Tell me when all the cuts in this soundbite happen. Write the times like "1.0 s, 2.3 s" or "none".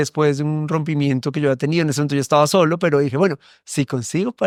none